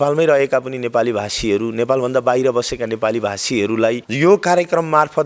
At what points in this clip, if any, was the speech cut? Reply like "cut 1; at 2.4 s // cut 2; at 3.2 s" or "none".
cut 1; at 4.1 s